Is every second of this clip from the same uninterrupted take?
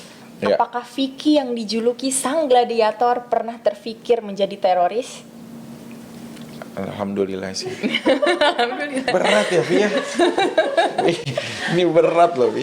yes; 0 cuts

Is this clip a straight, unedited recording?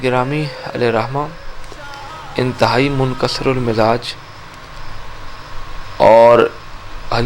yes; 0 cuts

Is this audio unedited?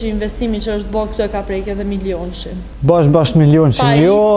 no; 1 cut; at 2.7 s

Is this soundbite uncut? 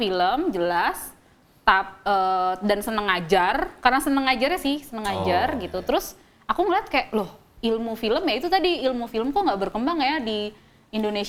yes; 0 cuts

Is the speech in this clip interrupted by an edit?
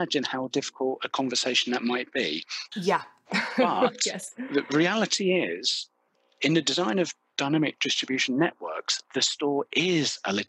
yes; 1 cut; at 2.6 s

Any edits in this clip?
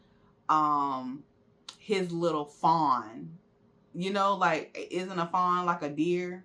no; 0 cuts

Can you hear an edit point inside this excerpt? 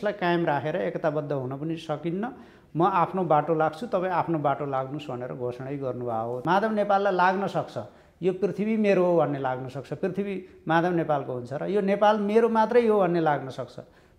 yes; 1 cut; at 6.4 s

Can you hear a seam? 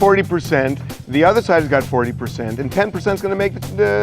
no; 0 cuts

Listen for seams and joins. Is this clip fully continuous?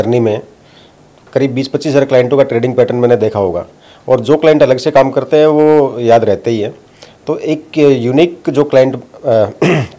yes; 0 cuts

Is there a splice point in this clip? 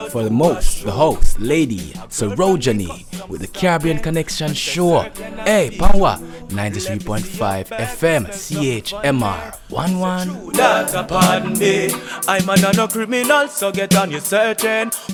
no; 0 cuts

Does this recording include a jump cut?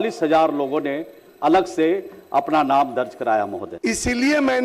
yes; 1 cut; at 3.6 s

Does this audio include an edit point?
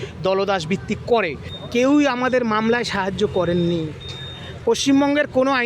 yes; 1 cut; at 1.5 s

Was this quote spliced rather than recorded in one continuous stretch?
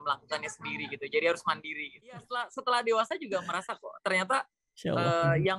yes; 1 cut; at 2.4 s

